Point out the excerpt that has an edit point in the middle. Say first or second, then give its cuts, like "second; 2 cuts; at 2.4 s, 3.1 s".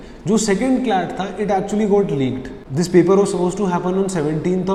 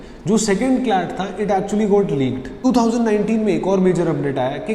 second; 1 cut; at 2.5 s